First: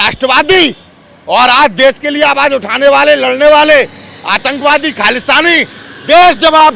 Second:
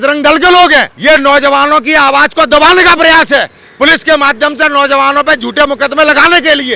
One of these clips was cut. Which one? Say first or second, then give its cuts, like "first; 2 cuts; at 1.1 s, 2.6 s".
second; 1 cut; at 0.9 s